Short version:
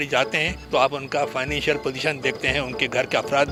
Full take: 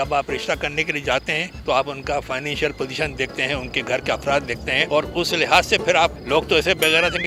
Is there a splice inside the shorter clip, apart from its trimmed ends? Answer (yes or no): no